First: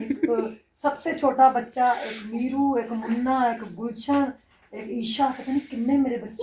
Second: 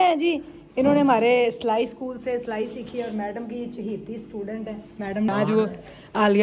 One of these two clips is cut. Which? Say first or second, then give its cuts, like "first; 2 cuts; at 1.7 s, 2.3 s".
second; 1 cut; at 5.3 s